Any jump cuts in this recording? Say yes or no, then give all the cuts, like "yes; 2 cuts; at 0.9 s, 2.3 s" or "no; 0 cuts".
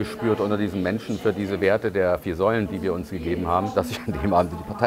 yes; 2 cuts; at 2.7 s, 3.7 s